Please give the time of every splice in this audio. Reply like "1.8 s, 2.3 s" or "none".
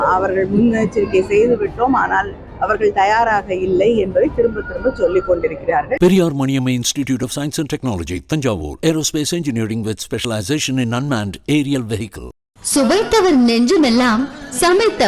5.9 s